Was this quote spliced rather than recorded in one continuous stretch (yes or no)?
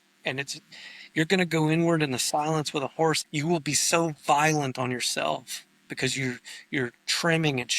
yes